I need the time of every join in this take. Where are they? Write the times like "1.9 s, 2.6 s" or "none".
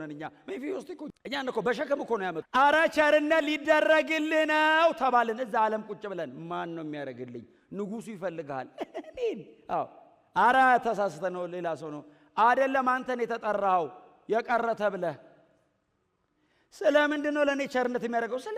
1.1 s, 2.4 s